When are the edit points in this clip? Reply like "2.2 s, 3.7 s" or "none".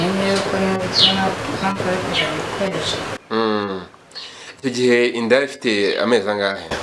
none